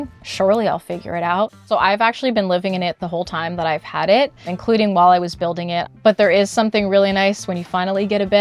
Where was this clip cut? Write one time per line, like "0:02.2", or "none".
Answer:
0:01.6
0:04.5
0:05.9